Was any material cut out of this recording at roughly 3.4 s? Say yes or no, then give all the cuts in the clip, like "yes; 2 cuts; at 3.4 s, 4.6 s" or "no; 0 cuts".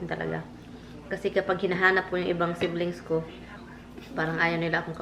yes; 1 cut; at 3.4 s